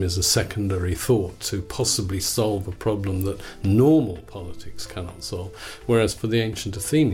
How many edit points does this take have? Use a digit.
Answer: 0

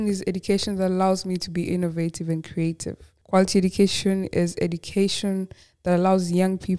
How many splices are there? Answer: 0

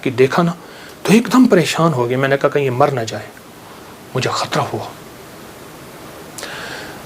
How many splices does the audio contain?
0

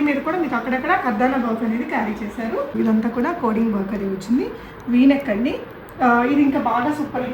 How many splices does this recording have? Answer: 1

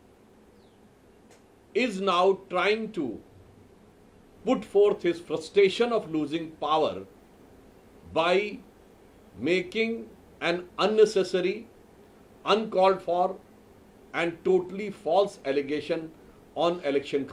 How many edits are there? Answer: 0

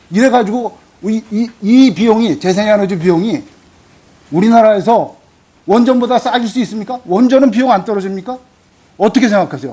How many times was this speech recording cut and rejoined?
1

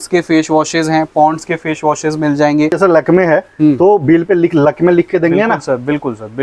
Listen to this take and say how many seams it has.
1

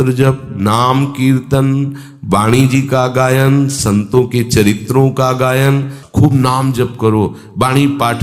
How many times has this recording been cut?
1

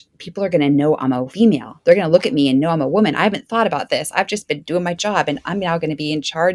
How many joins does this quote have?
1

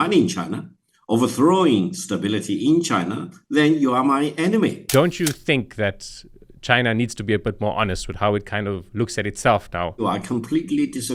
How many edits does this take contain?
2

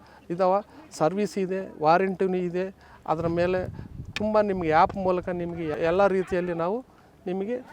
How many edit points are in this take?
1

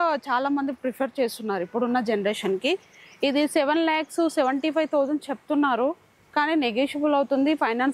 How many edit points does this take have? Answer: 0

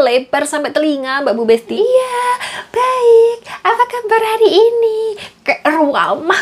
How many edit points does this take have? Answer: 1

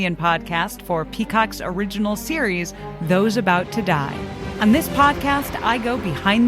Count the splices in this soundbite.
1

